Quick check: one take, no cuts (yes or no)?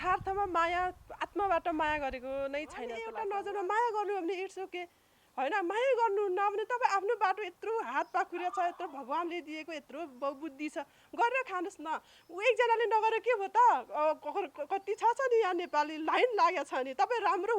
no